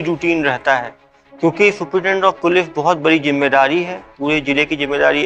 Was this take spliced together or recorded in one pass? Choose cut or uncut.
uncut